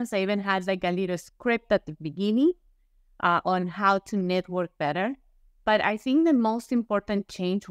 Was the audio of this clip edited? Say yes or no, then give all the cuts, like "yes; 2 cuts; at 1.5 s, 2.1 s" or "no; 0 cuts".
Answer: no; 0 cuts